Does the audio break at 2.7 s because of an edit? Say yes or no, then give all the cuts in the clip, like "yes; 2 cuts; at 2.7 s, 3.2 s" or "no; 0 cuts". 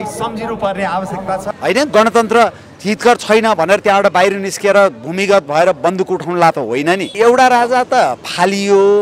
no; 2 cuts; at 1.5 s, 7.1 s